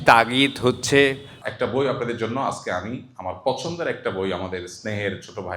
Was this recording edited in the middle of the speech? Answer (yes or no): yes